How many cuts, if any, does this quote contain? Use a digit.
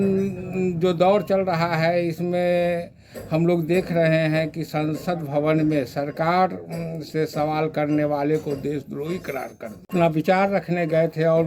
1